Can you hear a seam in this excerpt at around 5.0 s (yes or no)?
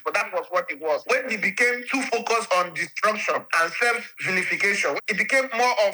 yes